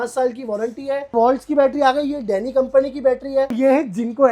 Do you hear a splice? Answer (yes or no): yes